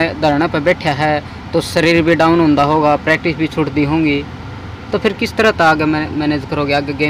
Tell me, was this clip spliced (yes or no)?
no